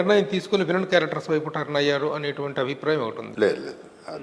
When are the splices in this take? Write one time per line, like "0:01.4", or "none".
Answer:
0:03.2